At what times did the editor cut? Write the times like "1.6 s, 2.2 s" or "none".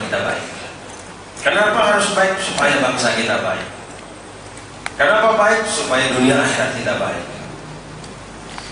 none